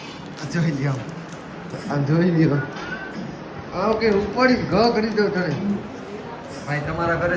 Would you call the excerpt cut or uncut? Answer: cut